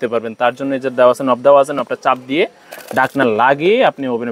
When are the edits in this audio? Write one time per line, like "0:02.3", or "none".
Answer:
none